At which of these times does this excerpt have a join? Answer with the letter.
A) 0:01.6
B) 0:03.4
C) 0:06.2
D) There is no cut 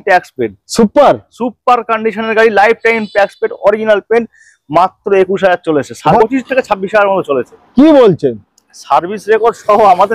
C